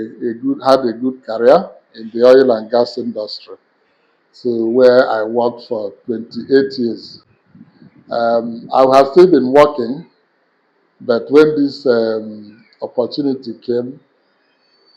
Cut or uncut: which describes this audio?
uncut